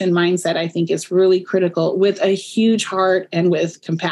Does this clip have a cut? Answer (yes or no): no